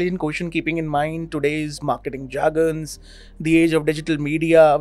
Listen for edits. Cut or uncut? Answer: uncut